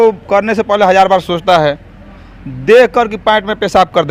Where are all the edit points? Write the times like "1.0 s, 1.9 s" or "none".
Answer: none